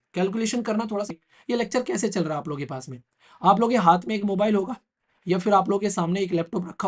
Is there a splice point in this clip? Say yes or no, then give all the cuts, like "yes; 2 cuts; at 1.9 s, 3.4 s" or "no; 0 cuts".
yes; 1 cut; at 1.2 s